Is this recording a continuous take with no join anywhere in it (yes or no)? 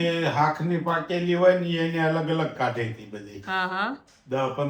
yes